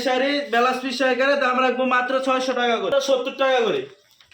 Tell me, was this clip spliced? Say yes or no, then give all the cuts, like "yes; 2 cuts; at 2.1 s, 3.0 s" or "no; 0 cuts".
yes; 1 cut; at 2.9 s